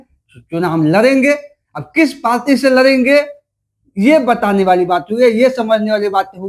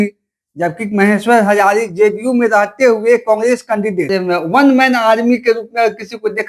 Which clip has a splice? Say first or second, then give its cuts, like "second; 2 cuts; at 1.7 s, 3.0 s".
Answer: second; 1 cut; at 4.1 s